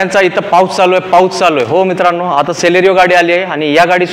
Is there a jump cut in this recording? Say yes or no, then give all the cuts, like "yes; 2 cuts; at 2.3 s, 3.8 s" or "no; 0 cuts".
no; 0 cuts